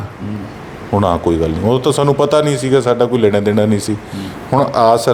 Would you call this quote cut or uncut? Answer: uncut